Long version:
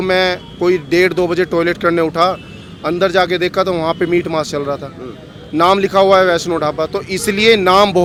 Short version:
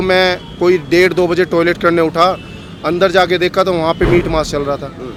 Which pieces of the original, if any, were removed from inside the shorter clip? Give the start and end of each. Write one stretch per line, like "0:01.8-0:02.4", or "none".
none